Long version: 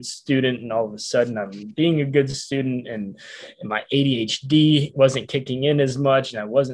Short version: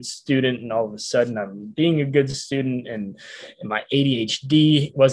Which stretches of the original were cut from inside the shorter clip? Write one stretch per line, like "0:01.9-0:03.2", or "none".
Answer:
none